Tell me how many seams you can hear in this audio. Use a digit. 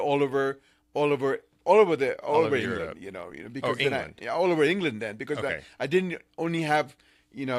0